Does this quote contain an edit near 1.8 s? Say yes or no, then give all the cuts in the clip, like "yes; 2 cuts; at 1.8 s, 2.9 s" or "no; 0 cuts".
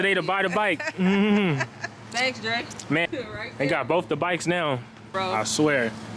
no; 2 cuts; at 3.1 s, 5.1 s